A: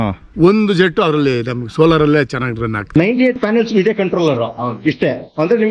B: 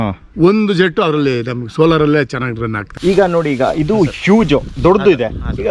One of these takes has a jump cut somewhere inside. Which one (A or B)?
A